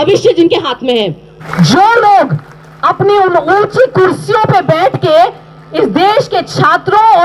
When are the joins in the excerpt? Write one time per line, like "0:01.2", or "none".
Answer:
0:01.2